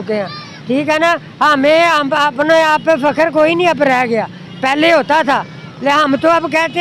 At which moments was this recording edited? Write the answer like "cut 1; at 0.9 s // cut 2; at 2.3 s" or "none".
none